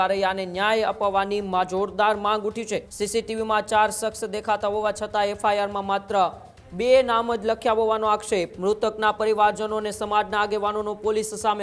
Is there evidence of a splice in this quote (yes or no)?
yes